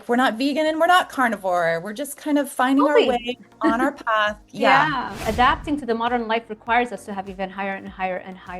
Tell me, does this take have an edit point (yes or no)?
yes